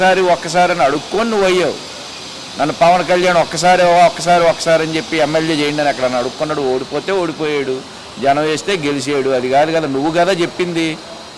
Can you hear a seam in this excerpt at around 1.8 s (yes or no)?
no